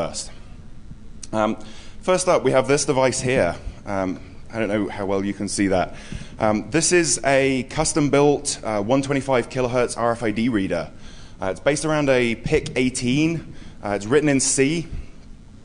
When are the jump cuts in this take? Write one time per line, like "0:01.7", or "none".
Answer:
none